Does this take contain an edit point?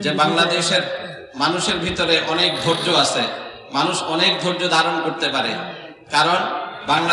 no; 0 cuts

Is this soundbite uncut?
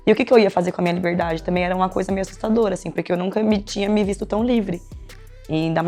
yes; 0 cuts

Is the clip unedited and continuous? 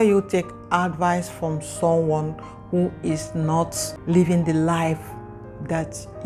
no; 1 cut; at 3.9 s

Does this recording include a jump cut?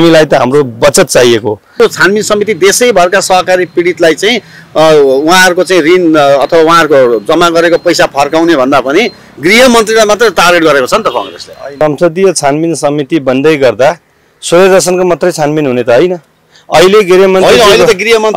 yes; 2 cuts; at 1.7 s, 11.8 s

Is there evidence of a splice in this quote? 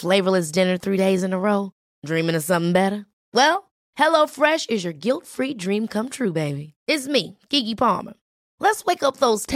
no; 0 cuts

